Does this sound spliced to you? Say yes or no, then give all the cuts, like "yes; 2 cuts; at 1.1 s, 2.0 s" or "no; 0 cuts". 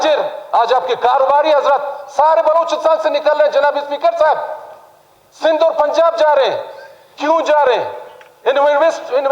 no; 0 cuts